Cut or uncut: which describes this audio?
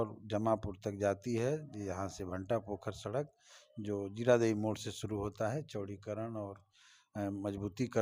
uncut